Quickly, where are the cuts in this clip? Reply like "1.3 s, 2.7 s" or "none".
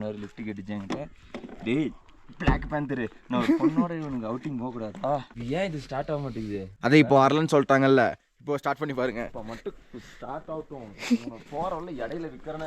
5.3 s, 6.7 s